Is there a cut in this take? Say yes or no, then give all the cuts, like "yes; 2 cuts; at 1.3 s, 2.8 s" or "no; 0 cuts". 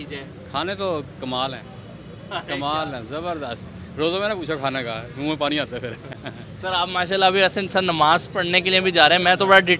no; 0 cuts